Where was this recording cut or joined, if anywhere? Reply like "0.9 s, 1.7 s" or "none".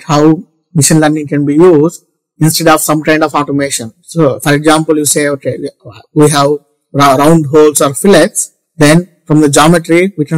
none